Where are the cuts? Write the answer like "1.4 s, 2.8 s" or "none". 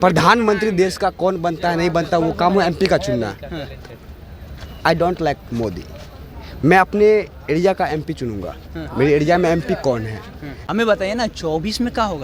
10.6 s